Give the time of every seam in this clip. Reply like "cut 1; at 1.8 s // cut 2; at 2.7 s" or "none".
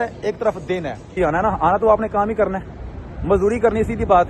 cut 1; at 1.1 s